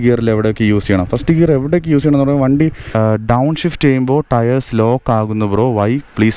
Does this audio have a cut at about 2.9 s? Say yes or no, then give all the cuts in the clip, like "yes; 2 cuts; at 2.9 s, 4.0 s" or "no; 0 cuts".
yes; 1 cut; at 2.9 s